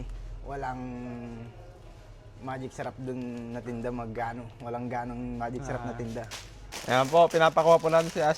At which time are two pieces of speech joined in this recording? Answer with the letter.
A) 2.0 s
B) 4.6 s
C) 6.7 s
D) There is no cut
C